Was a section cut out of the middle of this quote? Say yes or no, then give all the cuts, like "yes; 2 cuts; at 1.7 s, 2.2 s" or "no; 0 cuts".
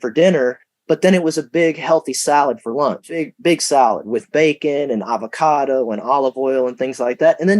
yes; 1 cut; at 3.0 s